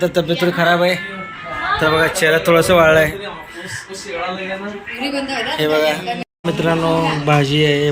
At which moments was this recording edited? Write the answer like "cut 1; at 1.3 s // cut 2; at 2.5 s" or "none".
cut 1; at 6.3 s